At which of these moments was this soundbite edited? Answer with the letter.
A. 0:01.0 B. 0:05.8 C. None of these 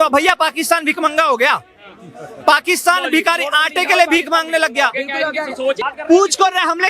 B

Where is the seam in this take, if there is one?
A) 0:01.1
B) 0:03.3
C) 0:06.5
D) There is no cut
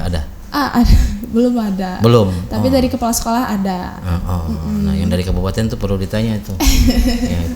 D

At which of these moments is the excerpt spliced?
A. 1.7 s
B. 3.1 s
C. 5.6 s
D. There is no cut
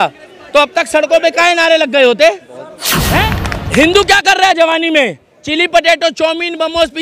B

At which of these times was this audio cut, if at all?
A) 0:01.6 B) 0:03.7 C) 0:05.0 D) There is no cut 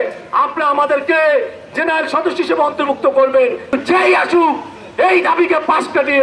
B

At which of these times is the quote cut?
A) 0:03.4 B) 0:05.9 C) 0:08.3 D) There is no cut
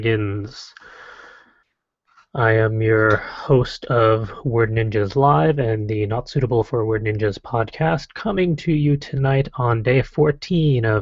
C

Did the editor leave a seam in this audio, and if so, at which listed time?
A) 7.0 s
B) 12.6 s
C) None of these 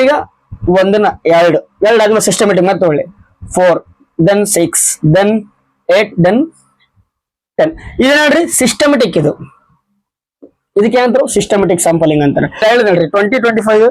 B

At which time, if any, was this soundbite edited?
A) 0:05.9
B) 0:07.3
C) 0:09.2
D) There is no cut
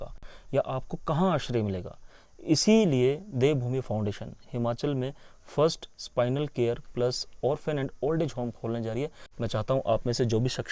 C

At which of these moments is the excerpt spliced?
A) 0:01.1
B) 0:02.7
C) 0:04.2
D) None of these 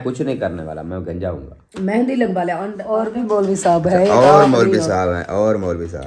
B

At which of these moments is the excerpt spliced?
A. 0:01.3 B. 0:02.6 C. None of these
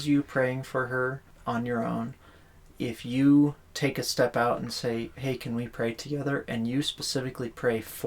A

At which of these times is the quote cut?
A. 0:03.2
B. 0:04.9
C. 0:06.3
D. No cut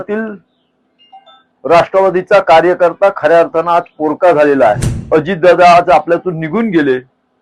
B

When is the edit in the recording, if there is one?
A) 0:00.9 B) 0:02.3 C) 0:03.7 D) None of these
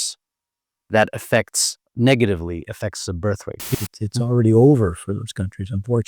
C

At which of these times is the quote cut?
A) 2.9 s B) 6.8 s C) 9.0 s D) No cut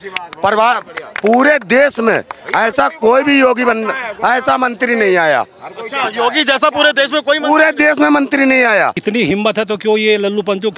C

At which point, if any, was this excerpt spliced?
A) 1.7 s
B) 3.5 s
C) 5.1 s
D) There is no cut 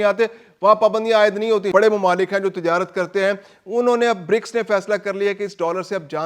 A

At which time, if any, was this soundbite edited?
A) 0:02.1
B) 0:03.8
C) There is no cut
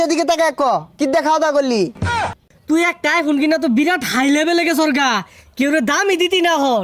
A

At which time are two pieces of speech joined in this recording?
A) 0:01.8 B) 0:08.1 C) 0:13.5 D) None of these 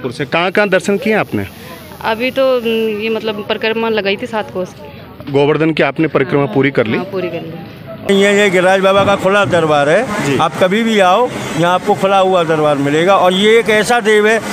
B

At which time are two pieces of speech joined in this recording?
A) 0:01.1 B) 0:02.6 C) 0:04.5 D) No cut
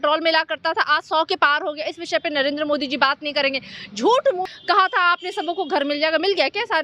C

